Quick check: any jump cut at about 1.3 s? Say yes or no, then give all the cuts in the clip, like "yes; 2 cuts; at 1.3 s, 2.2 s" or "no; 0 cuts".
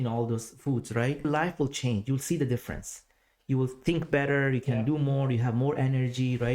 yes; 1 cut; at 1.3 s